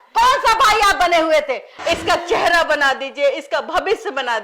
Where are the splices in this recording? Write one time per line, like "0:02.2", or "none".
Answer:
0:01.7